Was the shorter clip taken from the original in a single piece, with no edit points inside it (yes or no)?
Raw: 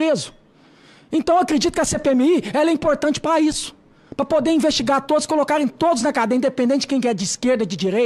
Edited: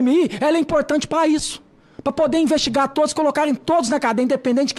yes